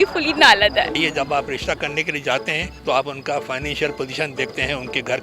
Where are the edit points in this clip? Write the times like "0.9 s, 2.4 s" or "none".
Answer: 1.0 s